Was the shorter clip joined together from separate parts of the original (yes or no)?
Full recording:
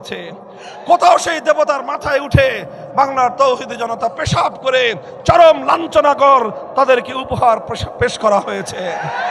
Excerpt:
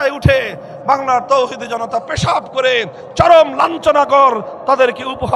no